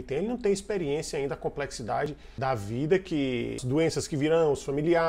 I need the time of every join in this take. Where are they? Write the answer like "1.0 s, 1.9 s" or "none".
2.4 s, 3.6 s